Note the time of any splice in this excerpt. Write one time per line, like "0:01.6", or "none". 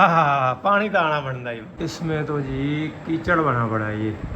0:01.7